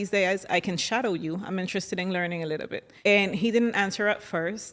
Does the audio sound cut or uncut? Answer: cut